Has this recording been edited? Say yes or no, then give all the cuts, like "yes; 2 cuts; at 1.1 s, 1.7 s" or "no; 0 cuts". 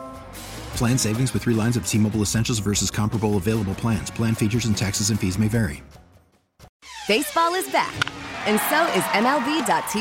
yes; 1 cut; at 6.7 s